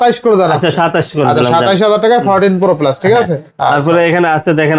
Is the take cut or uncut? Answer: uncut